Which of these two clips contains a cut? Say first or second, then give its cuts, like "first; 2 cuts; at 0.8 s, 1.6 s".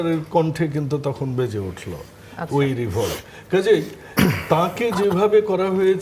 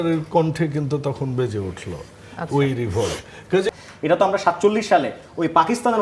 second; 1 cut; at 3.7 s